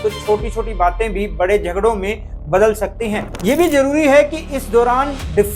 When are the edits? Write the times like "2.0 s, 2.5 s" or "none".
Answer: 3.3 s